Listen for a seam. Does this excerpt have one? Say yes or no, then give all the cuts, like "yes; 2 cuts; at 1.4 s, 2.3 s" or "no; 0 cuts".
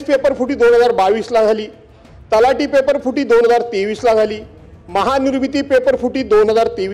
no; 0 cuts